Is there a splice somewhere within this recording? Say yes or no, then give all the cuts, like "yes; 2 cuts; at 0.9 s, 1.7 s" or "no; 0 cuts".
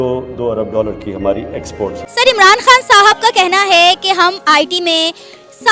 no; 0 cuts